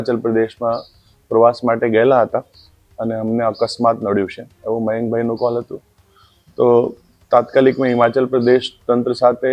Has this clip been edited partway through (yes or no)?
no